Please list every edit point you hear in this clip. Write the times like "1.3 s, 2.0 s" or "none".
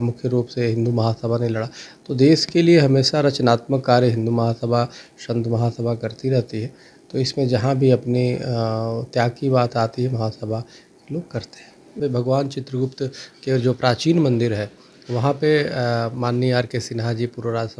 11.9 s